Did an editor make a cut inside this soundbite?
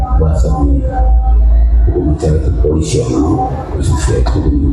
yes; 1 cut; at 3.8 s

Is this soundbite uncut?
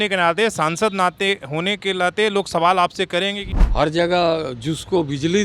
no; 1 cut; at 3.6 s

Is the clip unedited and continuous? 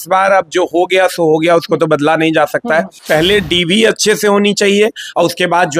no; 1 cut; at 3.0 s

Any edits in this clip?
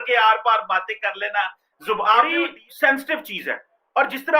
yes; 1 cut; at 2.3 s

